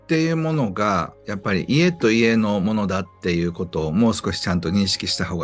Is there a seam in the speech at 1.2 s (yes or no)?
no